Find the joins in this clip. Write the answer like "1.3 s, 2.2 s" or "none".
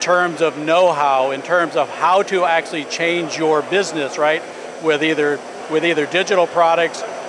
5.6 s